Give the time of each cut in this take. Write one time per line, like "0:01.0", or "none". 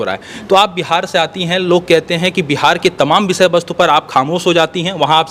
none